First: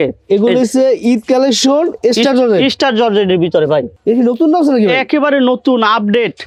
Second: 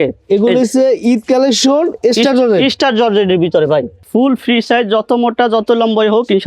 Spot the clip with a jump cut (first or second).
second